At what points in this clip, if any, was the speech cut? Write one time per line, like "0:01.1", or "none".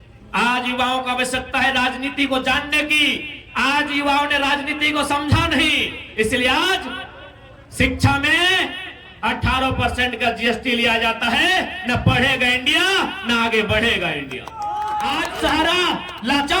0:15.3